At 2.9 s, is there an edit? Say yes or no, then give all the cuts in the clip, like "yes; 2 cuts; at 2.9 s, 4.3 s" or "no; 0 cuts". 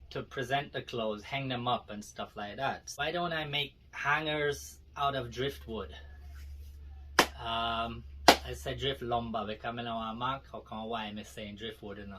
yes; 1 cut; at 2.9 s